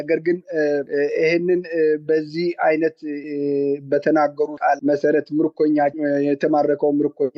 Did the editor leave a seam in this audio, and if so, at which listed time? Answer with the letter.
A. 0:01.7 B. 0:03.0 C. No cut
C